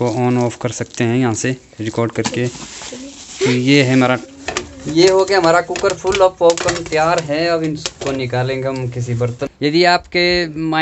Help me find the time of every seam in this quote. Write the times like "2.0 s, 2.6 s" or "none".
4.3 s, 9.4 s